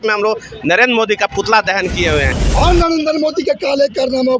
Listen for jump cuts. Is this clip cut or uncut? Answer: cut